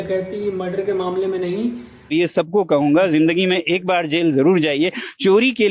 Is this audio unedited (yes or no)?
no